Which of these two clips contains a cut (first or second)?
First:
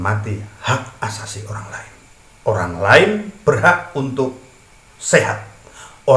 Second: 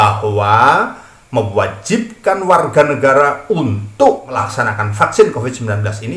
second